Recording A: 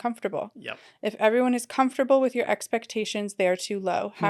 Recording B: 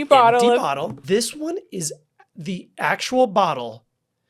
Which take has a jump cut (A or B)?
B